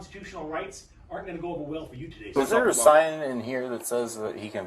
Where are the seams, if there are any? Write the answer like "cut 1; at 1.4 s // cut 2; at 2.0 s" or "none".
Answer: cut 1; at 2.3 s